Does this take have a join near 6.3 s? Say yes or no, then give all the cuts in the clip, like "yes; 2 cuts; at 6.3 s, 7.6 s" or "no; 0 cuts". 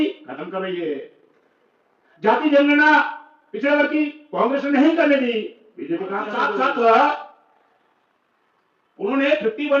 yes; 1 cut; at 6.3 s